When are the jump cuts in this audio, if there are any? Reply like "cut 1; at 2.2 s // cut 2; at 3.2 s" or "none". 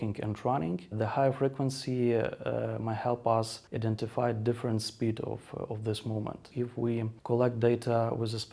cut 1; at 3.6 s // cut 2; at 6.4 s

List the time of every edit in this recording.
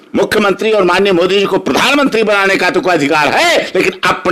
none

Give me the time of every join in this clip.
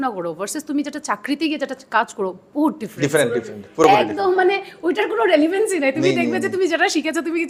none

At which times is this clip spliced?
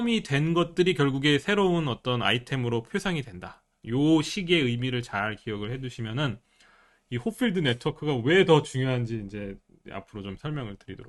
none

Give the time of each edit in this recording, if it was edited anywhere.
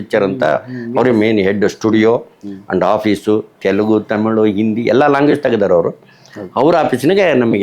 none

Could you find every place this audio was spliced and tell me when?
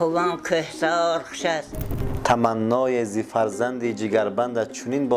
cut 1; at 2.0 s

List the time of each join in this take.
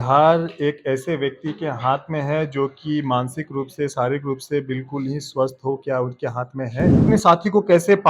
cut 1; at 7.0 s

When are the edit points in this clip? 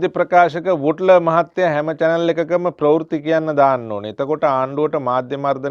none

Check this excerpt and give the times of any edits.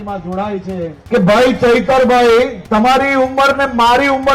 cut 1; at 1.0 s // cut 2; at 2.6 s

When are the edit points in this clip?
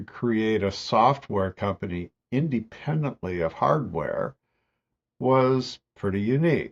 none

